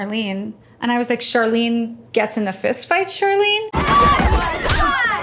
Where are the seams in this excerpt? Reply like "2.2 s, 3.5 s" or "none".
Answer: none